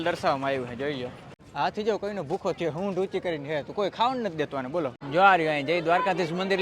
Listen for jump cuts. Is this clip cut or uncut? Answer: cut